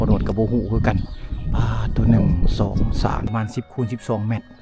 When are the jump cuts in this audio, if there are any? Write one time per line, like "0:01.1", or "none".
0:03.3